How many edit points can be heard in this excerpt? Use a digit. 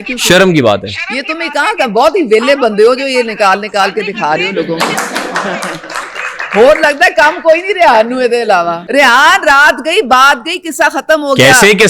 1